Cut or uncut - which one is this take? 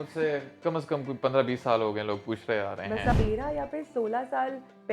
cut